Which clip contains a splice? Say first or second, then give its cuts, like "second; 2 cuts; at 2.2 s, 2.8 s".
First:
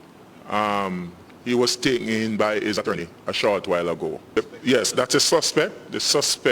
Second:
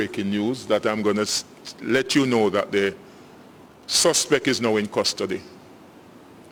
first; 1 cut; at 4.2 s